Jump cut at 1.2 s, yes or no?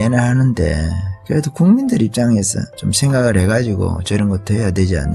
no